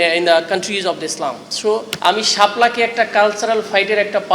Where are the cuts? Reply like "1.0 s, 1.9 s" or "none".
1.9 s